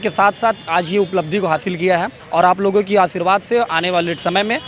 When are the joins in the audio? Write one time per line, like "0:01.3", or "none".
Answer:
0:02.2